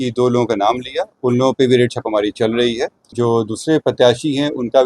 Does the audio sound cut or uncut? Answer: cut